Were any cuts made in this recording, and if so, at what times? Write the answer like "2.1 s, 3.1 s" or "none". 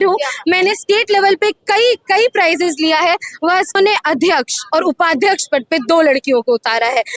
3.8 s